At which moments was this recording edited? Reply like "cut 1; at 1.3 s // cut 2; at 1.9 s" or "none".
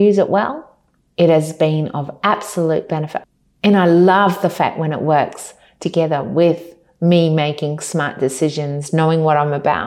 cut 1; at 3.1 s